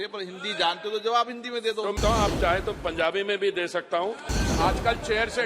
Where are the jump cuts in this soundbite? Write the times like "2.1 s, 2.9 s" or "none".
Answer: 2.0 s, 4.2 s